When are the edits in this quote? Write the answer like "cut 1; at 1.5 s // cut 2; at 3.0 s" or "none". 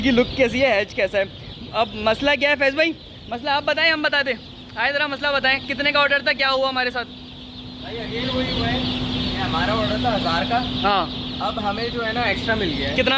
none